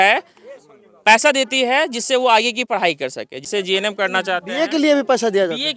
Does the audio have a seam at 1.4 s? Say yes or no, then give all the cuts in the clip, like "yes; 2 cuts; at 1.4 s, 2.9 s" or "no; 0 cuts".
no; 1 cut; at 3.5 s